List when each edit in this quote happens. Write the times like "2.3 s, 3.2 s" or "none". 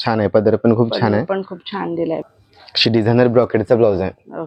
2.2 s